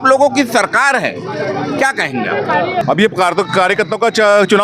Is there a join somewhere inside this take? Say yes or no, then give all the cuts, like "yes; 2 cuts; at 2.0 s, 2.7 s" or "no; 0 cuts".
yes; 1 cut; at 2.8 s